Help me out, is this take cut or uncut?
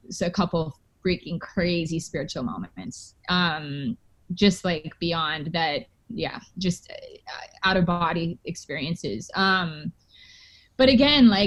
uncut